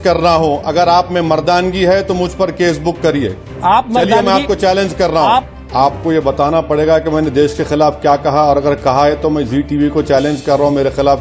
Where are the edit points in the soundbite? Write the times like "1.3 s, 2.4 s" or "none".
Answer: 5.5 s